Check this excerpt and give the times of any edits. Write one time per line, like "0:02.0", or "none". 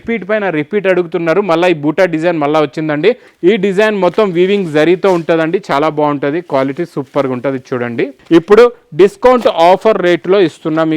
0:03.3
0:08.1